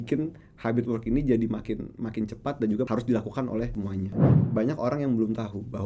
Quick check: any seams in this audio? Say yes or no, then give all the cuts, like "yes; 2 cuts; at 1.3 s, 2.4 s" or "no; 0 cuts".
yes; 1 cut; at 4.2 s